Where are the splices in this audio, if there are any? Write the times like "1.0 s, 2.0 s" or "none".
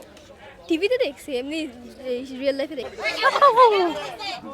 2.9 s